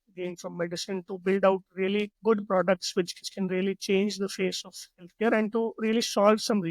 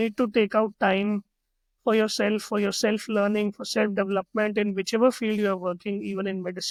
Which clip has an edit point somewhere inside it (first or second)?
first